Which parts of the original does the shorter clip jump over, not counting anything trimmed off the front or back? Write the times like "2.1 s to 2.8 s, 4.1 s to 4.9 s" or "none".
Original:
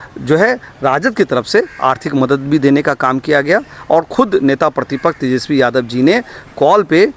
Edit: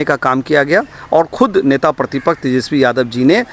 none